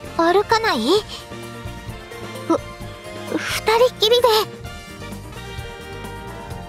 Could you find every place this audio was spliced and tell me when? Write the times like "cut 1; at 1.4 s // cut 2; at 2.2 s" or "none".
cut 1; at 4.5 s